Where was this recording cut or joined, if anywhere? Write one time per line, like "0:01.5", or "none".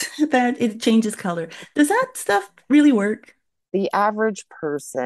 0:03.7